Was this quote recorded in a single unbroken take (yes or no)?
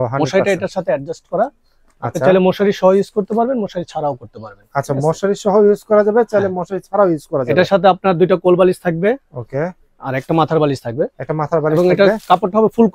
yes